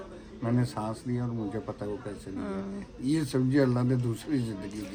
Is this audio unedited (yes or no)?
yes